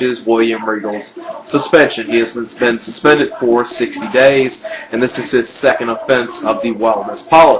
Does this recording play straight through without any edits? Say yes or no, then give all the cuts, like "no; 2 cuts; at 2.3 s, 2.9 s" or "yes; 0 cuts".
no; 1 cut; at 4.8 s